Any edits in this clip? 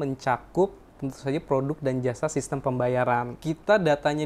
yes; 1 cut; at 3.3 s

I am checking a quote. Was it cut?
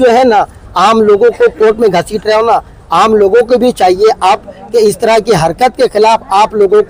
no; 0 cuts

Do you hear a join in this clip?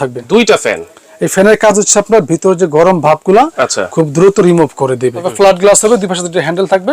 yes; 1 cut; at 5.3 s

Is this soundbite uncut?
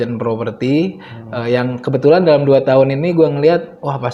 yes; 0 cuts

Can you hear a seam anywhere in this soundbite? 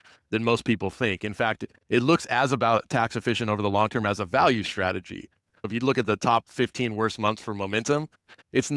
yes; 1 cut; at 5.6 s

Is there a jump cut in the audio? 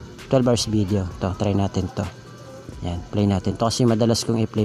no; 0 cuts

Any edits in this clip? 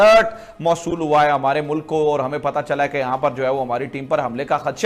no; 0 cuts

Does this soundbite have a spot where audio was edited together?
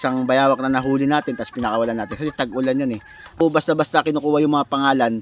yes; 1 cut; at 3.4 s

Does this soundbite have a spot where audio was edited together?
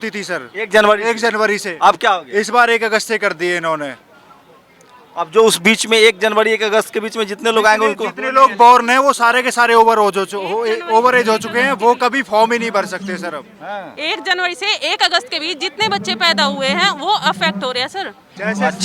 no; 0 cuts

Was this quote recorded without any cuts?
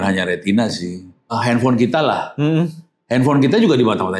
no; 1 cut; at 1.3 s

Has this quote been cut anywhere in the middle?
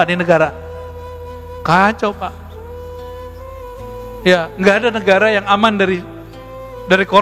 yes; 2 cuts; at 2.4 s, 3.8 s

